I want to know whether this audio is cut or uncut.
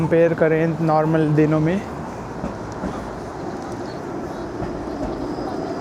uncut